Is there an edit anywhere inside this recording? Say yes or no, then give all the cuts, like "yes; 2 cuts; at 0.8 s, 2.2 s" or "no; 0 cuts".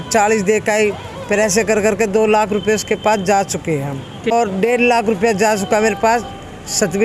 yes; 1 cut; at 4.3 s